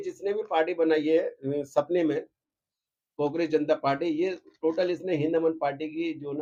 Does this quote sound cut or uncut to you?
uncut